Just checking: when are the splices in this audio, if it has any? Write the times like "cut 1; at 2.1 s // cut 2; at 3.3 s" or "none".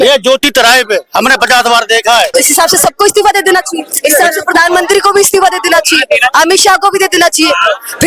cut 1; at 2.3 s // cut 2; at 3.9 s